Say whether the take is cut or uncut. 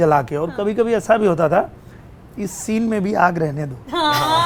uncut